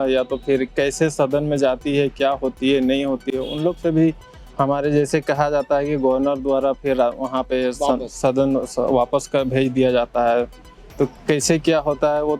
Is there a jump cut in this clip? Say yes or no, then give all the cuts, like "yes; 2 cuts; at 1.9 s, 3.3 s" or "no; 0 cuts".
no; 0 cuts